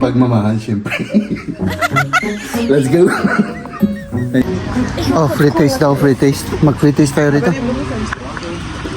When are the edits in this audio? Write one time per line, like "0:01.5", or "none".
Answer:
0:04.5